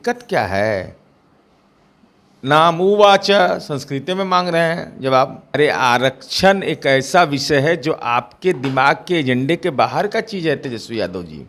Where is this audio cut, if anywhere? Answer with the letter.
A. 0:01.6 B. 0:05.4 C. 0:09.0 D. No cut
B